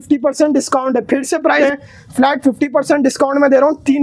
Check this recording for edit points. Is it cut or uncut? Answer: cut